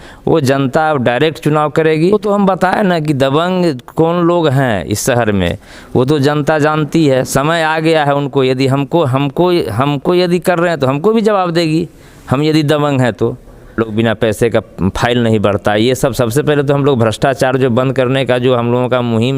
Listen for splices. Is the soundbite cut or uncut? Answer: cut